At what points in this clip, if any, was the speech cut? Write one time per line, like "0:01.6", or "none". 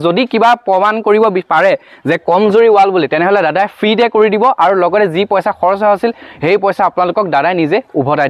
none